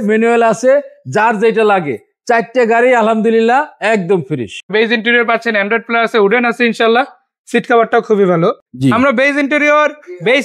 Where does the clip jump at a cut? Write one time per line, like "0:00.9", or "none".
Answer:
0:04.7
0:08.7